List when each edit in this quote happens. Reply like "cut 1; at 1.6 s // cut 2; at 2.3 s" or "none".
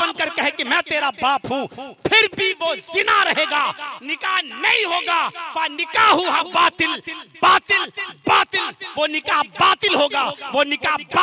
none